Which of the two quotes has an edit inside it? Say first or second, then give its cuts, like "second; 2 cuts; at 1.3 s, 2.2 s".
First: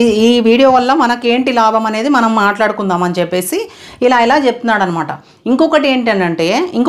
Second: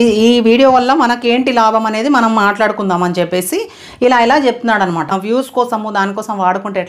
second; 1 cut; at 5.2 s